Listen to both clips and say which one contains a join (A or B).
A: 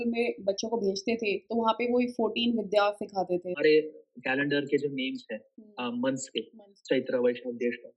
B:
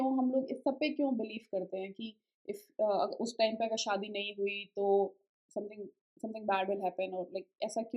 A